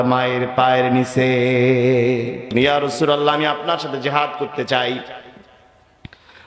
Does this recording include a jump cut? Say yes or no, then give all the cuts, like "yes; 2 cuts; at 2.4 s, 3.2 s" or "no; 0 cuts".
yes; 1 cut; at 2.4 s